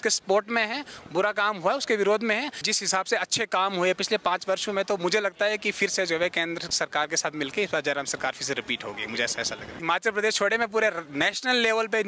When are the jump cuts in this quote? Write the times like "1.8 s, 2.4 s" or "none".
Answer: 2.6 s, 9.8 s